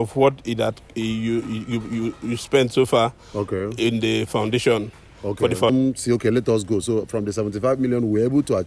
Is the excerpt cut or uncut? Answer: cut